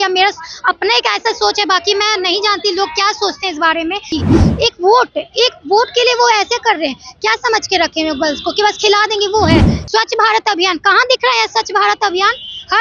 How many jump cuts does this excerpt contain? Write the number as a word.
two